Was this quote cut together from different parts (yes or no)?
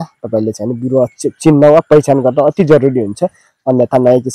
no